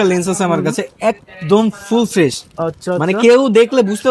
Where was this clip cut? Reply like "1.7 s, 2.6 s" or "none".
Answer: none